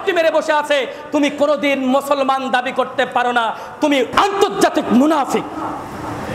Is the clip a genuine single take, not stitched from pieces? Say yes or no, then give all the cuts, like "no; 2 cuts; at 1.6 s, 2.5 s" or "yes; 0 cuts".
no; 1 cut; at 4.1 s